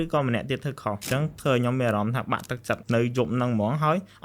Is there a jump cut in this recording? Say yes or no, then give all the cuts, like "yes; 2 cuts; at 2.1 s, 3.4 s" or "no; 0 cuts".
yes; 2 cuts; at 1.0 s, 2.8 s